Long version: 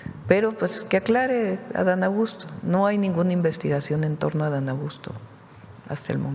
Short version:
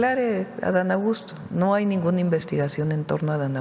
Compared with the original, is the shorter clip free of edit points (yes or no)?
yes